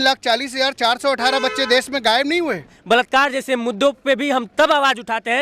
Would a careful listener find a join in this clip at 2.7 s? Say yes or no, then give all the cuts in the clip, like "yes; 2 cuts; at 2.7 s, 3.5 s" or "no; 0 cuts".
yes; 1 cut; at 2.7 s